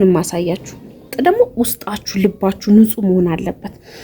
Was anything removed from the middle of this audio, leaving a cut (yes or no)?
yes